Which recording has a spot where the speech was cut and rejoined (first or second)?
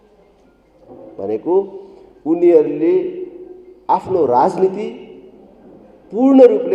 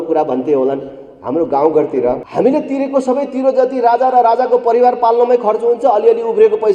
second